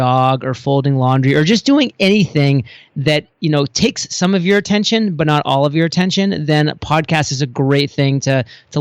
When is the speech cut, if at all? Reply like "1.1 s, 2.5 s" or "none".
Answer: none